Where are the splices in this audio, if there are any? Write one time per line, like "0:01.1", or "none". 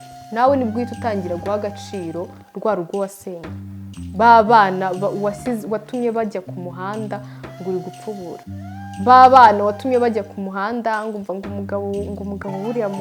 none